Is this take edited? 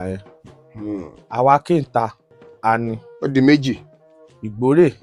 no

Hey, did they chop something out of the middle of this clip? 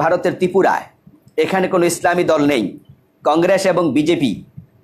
no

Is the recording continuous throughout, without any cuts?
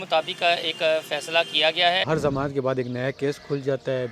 no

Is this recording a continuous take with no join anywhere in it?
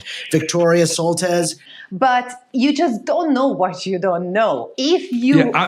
no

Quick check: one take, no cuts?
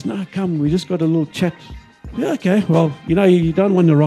no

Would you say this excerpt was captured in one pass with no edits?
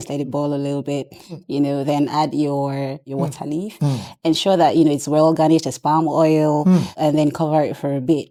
yes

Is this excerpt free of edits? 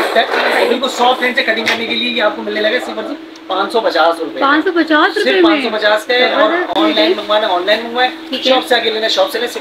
yes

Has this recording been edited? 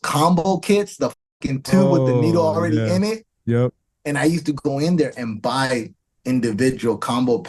no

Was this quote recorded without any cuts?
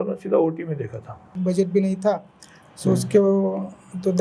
no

